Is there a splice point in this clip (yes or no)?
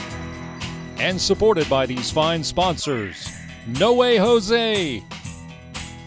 yes